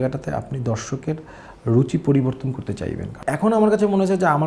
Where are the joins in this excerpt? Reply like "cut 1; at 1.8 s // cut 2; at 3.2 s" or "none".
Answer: cut 1; at 3.1 s